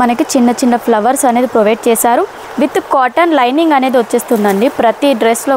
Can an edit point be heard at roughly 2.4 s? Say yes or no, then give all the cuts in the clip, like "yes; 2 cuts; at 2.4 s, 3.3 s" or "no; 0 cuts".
no; 0 cuts